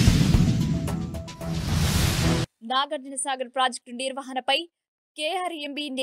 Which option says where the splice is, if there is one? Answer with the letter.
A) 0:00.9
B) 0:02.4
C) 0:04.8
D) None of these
B